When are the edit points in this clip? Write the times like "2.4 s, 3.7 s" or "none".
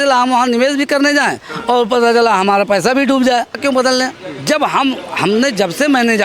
3.6 s